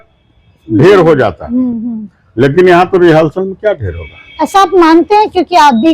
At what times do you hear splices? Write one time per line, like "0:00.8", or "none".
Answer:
none